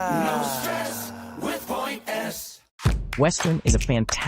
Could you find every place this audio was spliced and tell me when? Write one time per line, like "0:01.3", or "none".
0:02.8